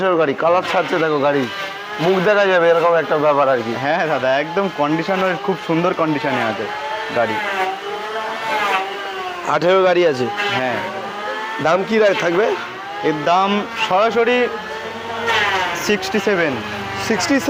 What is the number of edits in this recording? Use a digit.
0